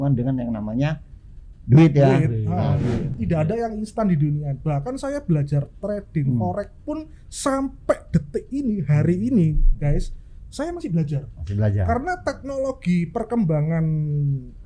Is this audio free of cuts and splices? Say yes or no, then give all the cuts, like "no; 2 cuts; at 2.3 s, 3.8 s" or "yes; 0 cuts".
no; 1 cut; at 3.1 s